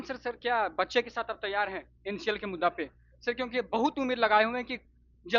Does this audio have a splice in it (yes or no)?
no